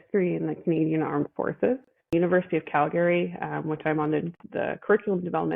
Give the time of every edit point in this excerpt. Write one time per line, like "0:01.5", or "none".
0:02.1